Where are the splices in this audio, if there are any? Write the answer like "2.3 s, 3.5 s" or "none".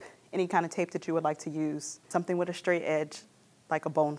2.1 s